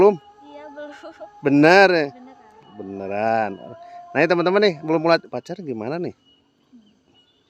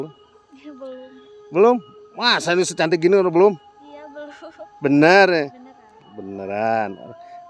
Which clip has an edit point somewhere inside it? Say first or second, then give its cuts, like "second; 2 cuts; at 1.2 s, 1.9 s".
first; 1 cut; at 5.3 s